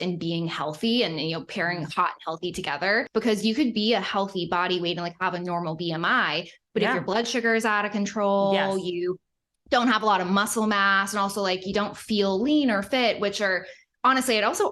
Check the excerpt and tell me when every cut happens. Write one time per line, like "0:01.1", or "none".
0:03.1